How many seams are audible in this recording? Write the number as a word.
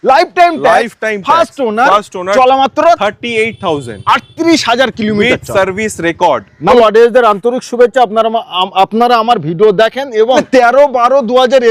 two